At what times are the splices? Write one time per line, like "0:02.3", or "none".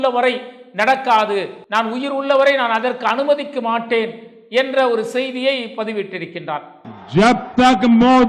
0:01.6

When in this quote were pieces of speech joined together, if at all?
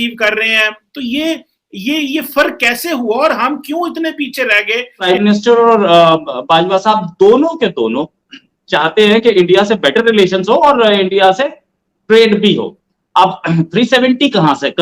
0:05.0

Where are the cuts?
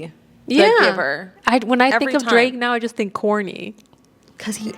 0:01.3

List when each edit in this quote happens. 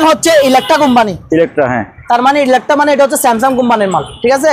none

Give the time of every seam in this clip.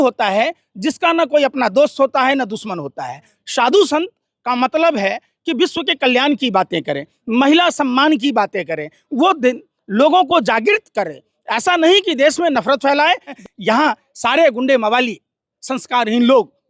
0:13.4

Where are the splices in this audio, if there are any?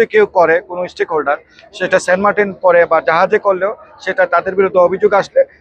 none

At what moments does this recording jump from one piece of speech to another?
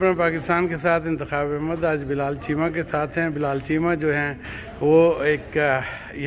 none

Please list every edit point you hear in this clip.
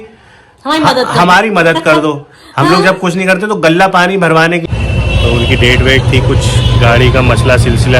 0:04.6

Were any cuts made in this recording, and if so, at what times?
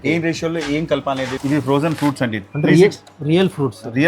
0:01.3

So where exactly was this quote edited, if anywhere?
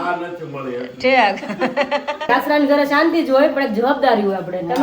0:02.3

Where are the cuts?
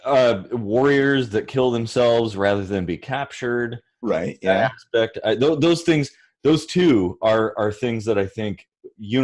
none

